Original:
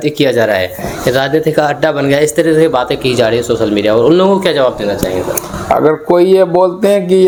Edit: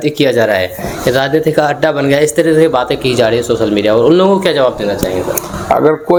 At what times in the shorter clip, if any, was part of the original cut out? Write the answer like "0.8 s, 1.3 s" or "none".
none